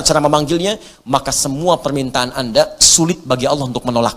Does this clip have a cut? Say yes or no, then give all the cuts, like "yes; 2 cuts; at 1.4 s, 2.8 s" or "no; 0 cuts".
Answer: no; 0 cuts